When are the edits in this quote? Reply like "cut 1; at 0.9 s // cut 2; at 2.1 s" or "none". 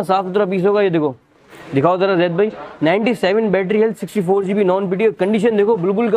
none